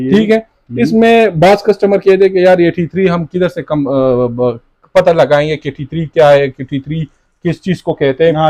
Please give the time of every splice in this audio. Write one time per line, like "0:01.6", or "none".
none